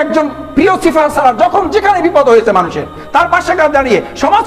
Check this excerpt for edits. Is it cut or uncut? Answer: uncut